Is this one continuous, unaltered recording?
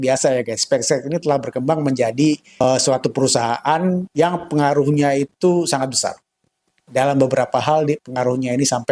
no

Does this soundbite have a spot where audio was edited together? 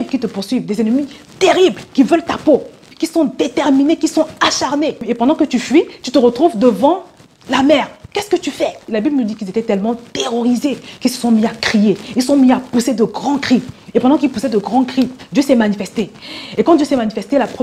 yes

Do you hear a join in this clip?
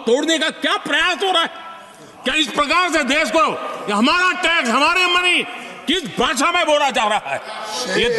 no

